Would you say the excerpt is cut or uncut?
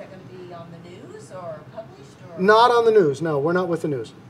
uncut